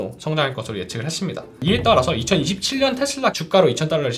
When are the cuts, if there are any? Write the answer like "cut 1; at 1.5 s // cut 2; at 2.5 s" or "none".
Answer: cut 1; at 1.6 s // cut 2; at 3.4 s